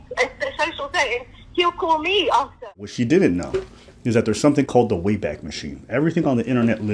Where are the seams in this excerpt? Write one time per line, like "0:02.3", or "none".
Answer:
0:02.7